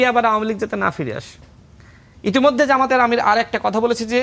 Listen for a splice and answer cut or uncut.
uncut